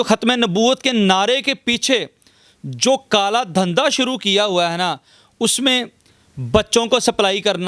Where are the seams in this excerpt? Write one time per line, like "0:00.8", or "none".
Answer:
none